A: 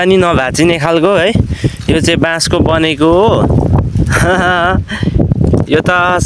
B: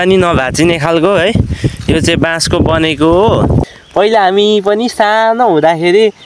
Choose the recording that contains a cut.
B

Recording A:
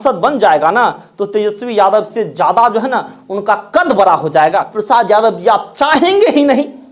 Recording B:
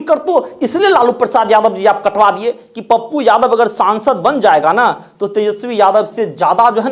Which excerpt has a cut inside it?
A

